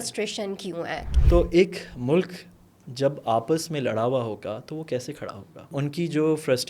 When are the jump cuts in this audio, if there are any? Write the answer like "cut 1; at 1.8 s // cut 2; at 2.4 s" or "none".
cut 1; at 1.0 s // cut 2; at 5.7 s

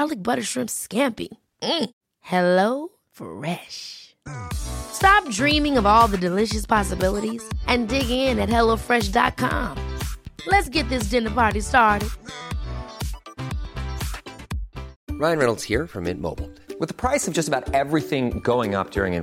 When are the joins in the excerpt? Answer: cut 1; at 14.9 s

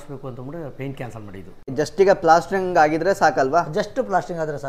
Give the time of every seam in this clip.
cut 1; at 1.7 s

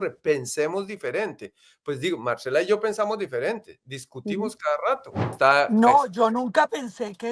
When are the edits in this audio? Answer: cut 1; at 5.2 s

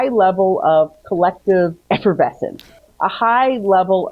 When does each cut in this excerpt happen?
cut 1; at 1.8 s

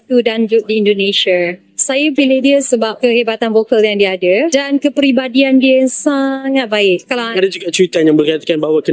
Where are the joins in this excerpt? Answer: cut 1; at 7.3 s

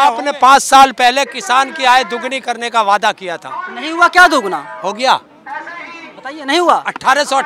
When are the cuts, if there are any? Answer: none

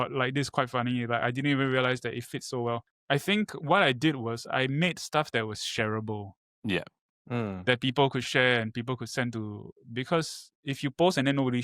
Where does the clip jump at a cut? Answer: cut 1; at 2.9 s

